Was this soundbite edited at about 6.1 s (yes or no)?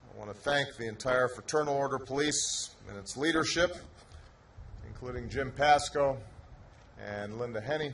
no